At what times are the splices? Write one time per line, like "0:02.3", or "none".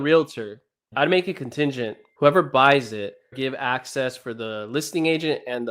0:00.9
0:02.0
0:03.3